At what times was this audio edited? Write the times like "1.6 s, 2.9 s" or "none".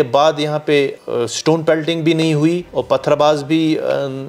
1.0 s, 2.7 s

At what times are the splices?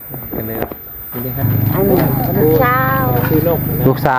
1.5 s

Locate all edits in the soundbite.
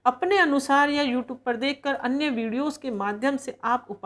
none

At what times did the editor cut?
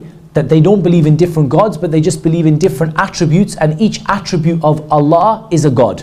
none

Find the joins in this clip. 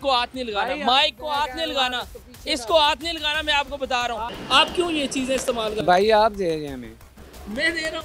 2.1 s, 4.3 s

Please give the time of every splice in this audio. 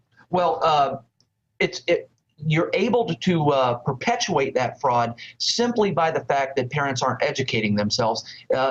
2.8 s

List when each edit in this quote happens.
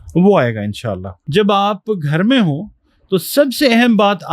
1.1 s

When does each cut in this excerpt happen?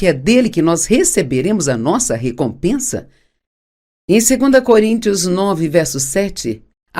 4.2 s

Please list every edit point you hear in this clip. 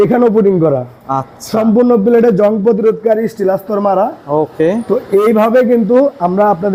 none

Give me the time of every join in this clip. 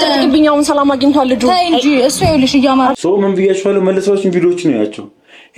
2.9 s

